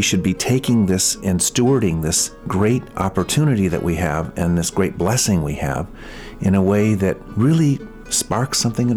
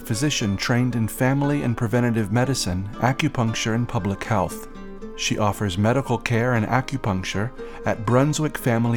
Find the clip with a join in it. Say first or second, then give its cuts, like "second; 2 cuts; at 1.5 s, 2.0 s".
first; 4 cuts; at 1.2 s, 2.3 s, 2.9 s, 7.3 s